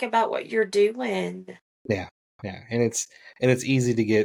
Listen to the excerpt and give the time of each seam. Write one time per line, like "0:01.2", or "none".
none

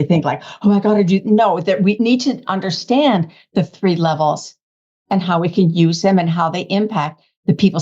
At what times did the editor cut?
0:02.0

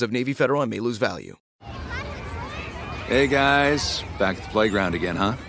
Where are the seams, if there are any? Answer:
0:01.4

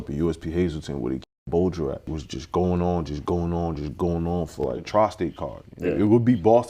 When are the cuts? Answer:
0:02.1
0:04.8

